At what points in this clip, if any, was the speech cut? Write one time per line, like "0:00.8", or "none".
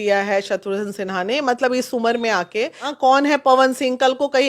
0:02.8